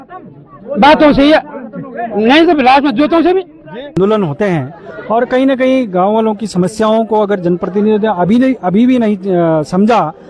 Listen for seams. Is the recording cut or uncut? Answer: cut